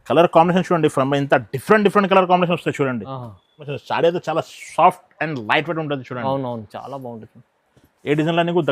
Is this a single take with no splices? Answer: no; 1 cut; at 3.7 s

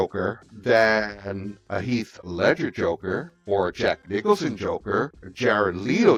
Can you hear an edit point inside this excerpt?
no; 0 cuts

